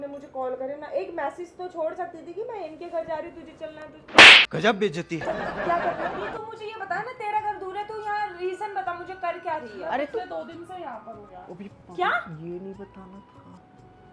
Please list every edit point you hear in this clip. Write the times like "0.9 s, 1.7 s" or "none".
6.3 s

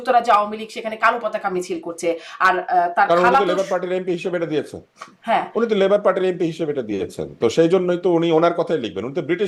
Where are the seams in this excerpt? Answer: none

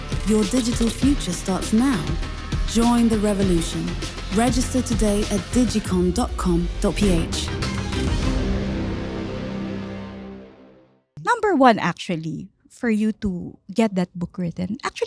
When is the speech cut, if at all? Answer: 11.1 s

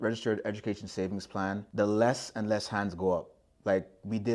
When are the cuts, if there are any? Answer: 1.7 s

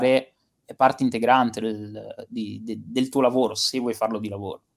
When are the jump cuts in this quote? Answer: none

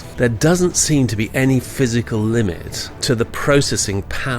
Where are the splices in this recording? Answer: 2.9 s

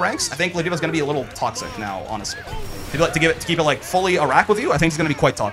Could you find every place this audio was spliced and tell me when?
none

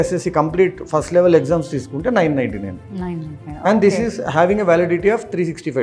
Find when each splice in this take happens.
none

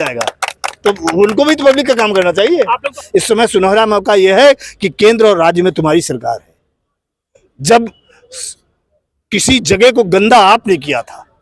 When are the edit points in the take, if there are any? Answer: 2.9 s

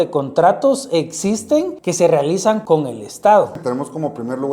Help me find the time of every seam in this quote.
1.8 s, 2.6 s, 3.6 s

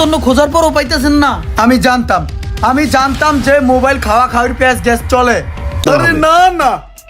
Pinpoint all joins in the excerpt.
5.8 s

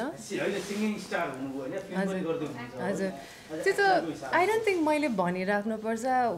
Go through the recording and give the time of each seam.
none

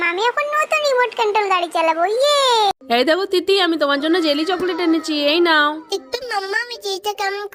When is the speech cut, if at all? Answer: none

